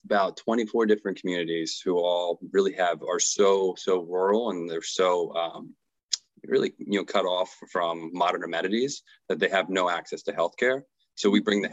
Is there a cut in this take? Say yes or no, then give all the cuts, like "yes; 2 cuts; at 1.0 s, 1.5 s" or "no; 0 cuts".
no; 0 cuts